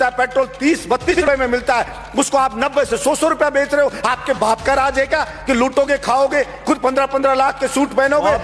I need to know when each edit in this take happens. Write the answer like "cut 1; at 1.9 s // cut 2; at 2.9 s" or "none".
cut 1; at 1.1 s